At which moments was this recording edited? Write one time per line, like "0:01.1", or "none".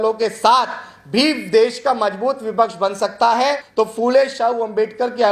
0:03.6